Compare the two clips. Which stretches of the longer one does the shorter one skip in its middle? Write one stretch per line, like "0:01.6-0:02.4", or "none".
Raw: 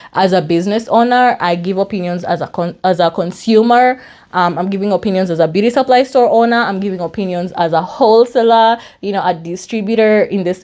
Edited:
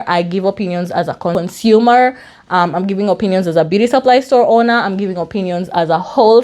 0:02.7-0:03.2